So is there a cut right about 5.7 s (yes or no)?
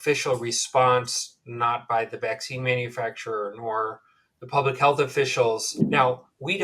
yes